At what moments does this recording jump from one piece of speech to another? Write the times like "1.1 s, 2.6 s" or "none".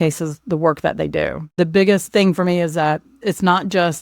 1.4 s, 2.1 s, 3.2 s